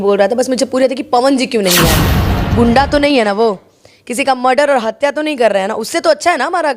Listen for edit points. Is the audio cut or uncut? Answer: cut